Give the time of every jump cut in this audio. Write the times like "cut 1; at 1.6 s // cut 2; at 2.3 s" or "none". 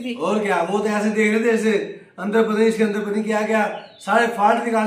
none